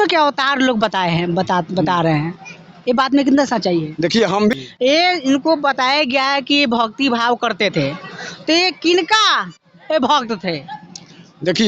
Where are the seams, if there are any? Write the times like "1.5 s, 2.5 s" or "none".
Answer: 4.6 s